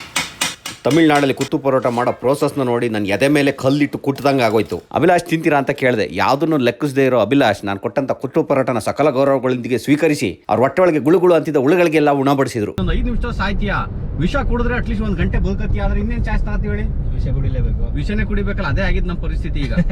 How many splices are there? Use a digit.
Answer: 2